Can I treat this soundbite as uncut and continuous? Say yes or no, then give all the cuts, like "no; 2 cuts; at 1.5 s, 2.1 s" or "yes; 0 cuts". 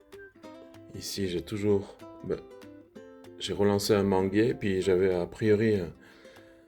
no; 1 cut; at 0.9 s